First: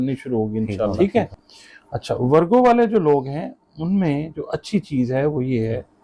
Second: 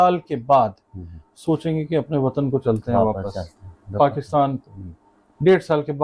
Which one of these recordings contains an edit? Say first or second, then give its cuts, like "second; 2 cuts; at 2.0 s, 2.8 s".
first; 1 cut; at 0.9 s